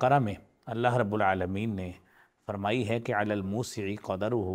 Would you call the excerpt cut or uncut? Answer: uncut